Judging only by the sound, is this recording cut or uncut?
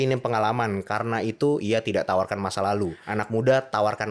cut